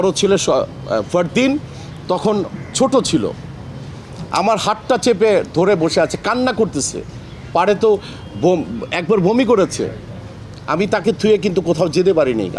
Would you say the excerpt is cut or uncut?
uncut